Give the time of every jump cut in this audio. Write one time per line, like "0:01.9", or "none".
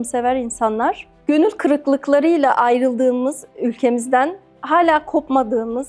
0:01.1